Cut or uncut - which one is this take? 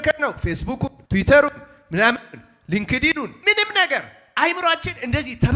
cut